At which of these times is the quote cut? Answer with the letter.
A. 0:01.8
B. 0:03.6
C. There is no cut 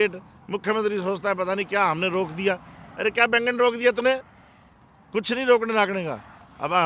C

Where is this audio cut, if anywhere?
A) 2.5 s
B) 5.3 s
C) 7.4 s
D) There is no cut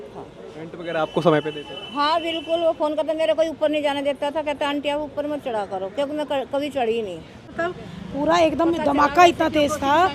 C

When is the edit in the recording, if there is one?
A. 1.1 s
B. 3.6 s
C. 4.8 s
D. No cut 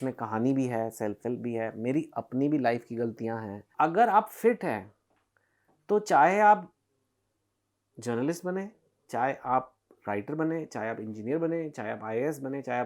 B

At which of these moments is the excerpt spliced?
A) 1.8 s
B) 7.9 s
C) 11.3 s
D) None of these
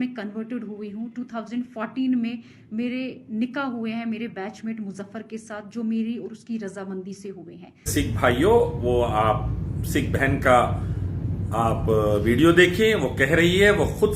B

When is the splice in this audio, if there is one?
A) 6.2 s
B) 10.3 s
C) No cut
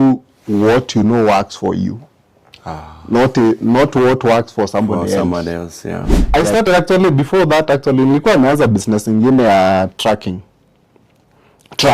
A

